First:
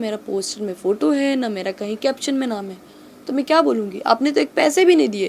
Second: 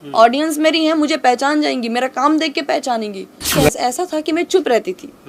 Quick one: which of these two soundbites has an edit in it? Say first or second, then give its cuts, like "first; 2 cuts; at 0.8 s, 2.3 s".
second; 1 cut; at 3.5 s